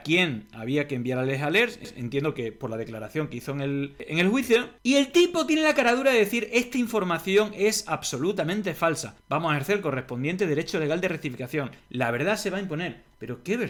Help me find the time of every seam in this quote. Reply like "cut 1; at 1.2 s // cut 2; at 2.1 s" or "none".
none